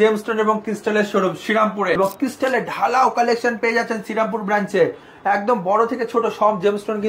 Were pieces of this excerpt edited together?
yes; 1 cut; at 2.0 s

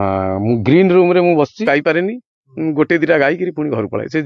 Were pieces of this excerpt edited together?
yes; 1 cut; at 1.7 s

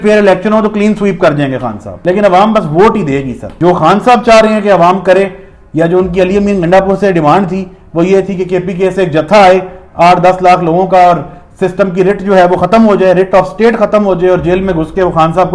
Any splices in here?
no; 0 cuts

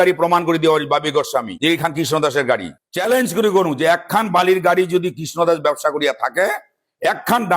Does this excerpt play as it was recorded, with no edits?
no; 2 cuts; at 1.5 s, 2.8 s

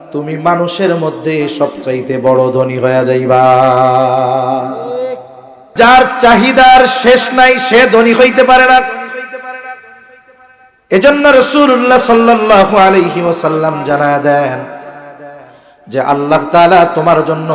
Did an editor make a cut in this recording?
yes; 1 cut; at 5.7 s

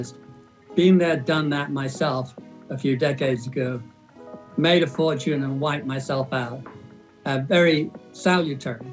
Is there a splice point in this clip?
no; 0 cuts

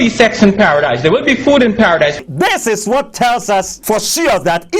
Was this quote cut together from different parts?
yes; 1 cut; at 3.7 s

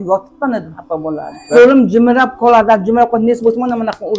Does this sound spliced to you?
yes; 1 cut; at 1.5 s

